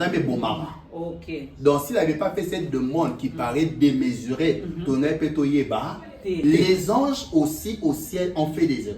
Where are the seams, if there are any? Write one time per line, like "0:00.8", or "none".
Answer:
0:06.4